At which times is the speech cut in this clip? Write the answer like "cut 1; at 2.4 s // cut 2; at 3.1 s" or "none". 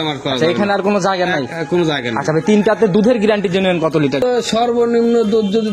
cut 1; at 4.2 s